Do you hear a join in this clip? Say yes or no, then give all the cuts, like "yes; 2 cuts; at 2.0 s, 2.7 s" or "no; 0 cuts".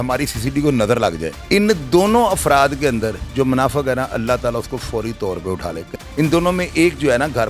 yes; 2 cuts; at 1.3 s, 5.9 s